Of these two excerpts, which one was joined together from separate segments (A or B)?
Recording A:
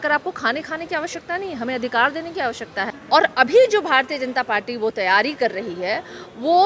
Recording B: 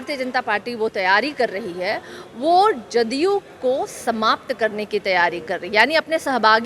A